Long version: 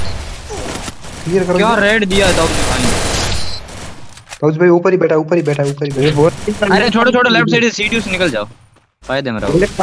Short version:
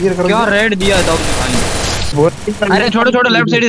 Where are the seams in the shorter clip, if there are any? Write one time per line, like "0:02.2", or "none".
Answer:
0:02.1

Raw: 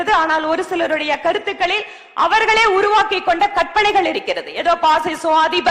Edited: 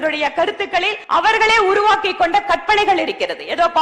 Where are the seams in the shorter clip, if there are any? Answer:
0:01.0

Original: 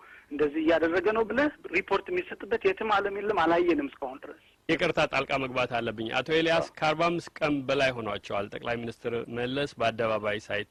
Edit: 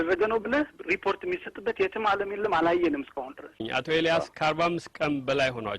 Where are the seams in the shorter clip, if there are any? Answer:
0:03.6

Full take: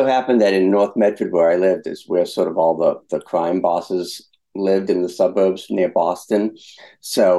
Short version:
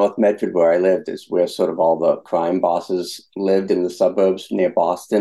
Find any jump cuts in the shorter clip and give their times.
0:02.2
0:03.2

